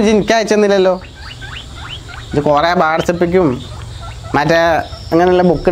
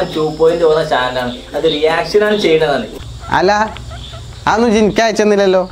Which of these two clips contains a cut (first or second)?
second